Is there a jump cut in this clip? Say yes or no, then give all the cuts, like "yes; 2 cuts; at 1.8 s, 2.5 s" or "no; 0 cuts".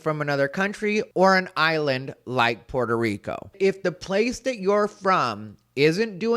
yes; 1 cut; at 3.5 s